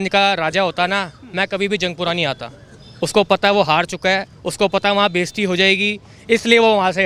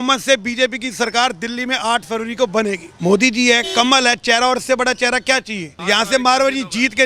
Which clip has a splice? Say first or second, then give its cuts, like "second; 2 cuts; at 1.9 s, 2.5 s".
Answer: second; 2 cuts; at 2.9 s, 5.7 s